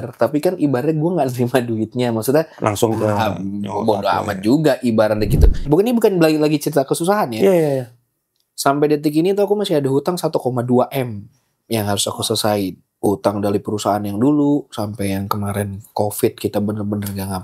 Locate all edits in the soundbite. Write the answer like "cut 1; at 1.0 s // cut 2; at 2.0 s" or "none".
cut 1; at 5.7 s // cut 2; at 12.9 s